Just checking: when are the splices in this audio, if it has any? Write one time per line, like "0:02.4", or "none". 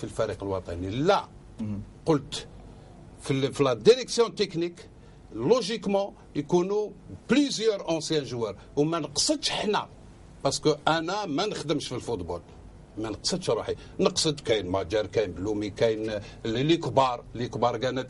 0:02.3